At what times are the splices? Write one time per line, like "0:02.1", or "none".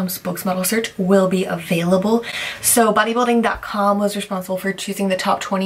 none